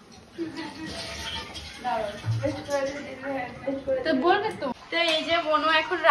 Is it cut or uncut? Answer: cut